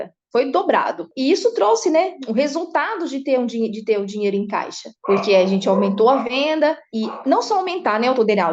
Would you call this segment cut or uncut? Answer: cut